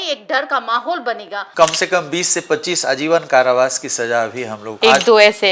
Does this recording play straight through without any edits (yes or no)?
no